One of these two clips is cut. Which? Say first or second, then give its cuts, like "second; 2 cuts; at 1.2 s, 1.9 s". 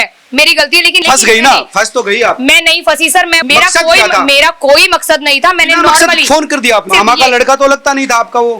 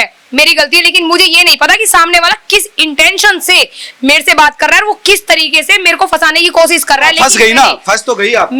first; 3 cuts; at 1.0 s, 3.4 s, 6.9 s